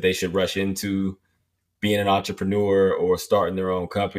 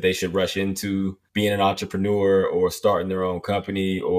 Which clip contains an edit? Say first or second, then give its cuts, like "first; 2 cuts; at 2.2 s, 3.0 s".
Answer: second; 1 cut; at 1.2 s